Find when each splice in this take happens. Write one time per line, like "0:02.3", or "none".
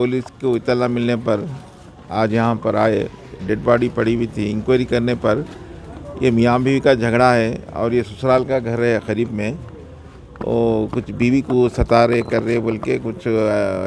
none